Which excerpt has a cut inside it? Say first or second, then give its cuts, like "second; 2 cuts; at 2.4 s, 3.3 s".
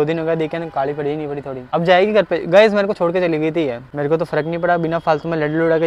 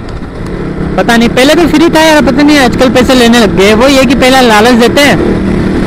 first; 2 cuts; at 1.6 s, 3.8 s